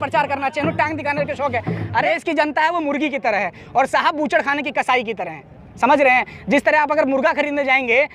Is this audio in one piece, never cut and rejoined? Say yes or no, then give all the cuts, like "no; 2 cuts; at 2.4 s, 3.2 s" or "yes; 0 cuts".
no; 1 cut; at 2.1 s